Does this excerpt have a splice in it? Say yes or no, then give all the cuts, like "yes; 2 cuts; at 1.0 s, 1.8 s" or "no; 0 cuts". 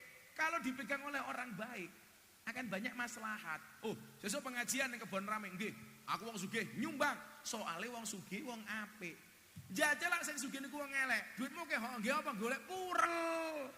no; 0 cuts